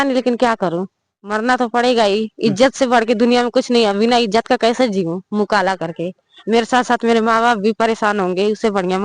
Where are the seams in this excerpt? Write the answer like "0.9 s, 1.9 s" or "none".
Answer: none